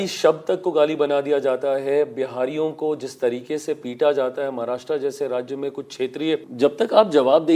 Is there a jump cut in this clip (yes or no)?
yes